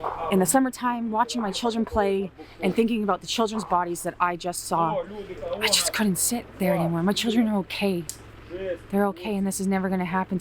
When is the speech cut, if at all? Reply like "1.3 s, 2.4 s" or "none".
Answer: 5.4 s